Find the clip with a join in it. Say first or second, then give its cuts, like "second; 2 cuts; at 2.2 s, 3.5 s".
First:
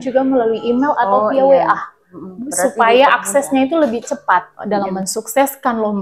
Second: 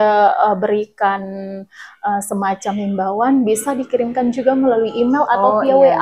first; 1 cut; at 4.5 s